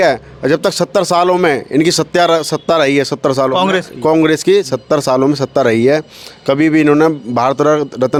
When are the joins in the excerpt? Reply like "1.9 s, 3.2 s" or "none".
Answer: none